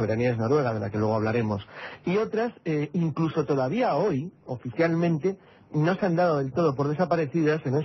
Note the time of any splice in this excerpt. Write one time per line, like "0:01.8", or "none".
0:05.9